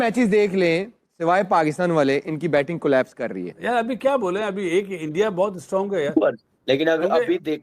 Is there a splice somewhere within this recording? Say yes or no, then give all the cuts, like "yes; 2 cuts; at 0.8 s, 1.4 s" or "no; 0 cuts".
yes; 2 cuts; at 3.5 s, 6.5 s